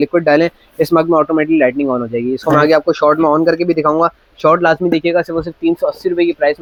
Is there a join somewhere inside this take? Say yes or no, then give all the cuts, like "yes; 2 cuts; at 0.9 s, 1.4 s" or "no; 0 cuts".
no; 0 cuts